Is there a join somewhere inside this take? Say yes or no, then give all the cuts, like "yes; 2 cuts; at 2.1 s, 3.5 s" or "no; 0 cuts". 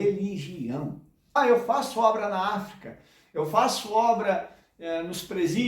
yes; 1 cut; at 1.4 s